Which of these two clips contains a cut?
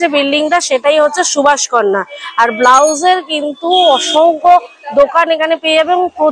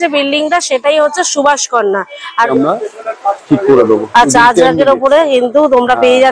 second; 1 cut; at 2.5 s

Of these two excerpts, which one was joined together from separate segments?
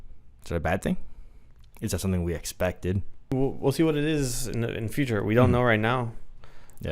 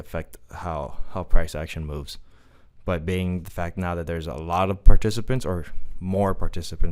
first; 1 cut; at 3.3 s

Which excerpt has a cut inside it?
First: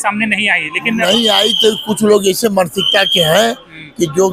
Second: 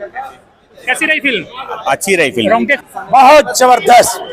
second; 1 cut; at 2.8 s

